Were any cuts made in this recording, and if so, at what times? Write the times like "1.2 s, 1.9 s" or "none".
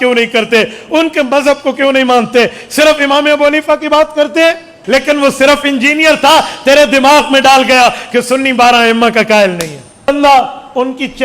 4.8 s, 10.1 s